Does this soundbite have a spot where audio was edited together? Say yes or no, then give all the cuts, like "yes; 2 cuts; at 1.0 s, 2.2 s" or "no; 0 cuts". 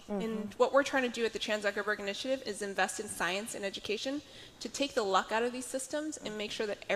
no; 0 cuts